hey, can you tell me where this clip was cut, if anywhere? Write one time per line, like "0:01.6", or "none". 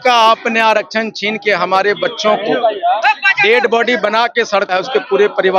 none